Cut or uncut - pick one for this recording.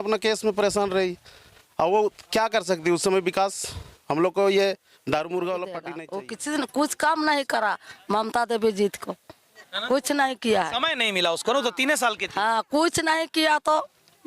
cut